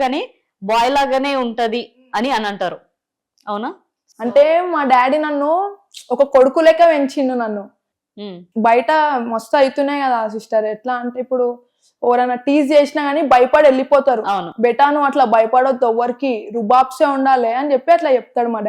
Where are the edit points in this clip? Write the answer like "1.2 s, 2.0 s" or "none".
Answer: 8.2 s